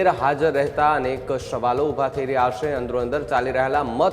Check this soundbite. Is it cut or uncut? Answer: uncut